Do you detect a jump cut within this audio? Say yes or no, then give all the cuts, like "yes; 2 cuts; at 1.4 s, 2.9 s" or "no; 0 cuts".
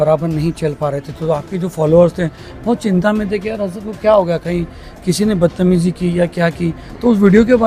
no; 0 cuts